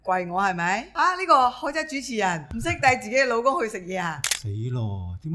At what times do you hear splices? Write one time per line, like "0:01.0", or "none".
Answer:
0:00.9
0:02.5
0:04.2